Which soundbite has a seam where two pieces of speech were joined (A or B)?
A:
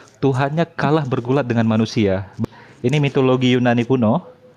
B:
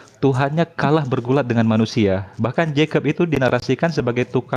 A